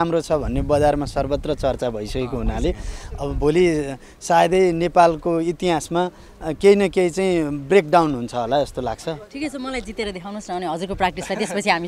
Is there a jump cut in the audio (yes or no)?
no